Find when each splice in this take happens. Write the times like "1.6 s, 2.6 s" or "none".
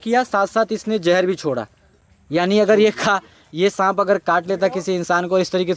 none